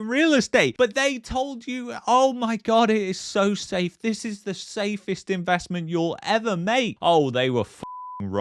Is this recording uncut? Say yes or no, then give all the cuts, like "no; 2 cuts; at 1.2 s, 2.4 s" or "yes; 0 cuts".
no; 1 cut; at 6.9 s